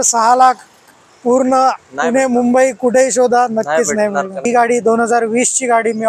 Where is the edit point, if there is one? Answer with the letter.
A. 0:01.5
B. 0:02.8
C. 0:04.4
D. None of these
C